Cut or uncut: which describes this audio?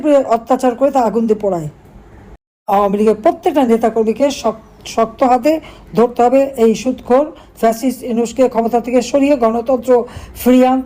cut